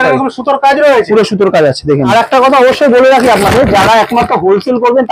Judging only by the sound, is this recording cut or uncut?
cut